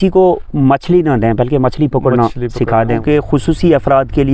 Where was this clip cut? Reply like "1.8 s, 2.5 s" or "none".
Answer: 2.9 s